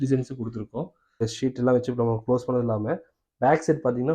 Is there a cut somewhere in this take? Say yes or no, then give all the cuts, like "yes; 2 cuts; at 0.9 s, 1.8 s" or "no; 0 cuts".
yes; 1 cut; at 1.3 s